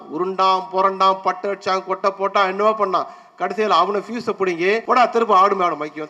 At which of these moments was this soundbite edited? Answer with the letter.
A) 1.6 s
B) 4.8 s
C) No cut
B